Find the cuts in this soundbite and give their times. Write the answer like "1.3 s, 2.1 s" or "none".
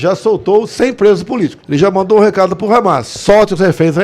1.6 s